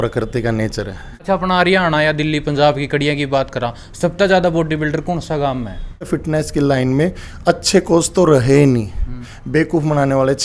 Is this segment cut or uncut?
cut